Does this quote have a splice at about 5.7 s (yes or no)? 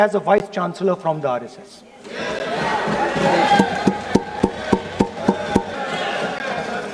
yes